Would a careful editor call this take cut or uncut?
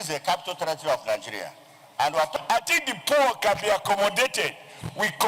cut